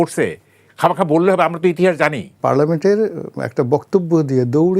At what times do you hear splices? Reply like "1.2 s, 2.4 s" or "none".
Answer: 2.3 s